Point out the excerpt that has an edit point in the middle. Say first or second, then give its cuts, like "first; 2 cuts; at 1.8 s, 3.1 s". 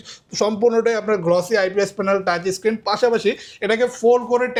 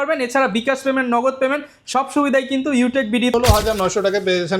second; 1 cut; at 3.3 s